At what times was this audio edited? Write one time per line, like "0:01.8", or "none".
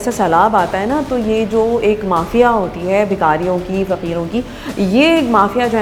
none